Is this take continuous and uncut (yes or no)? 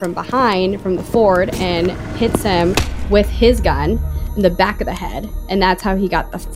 yes